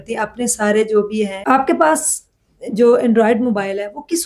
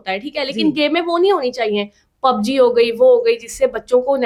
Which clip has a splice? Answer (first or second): first